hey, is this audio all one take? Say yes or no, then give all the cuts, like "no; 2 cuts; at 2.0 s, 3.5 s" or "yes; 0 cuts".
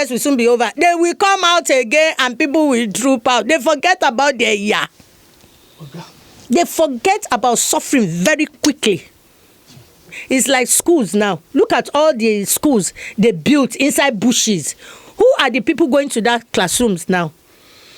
no; 1 cut; at 10.2 s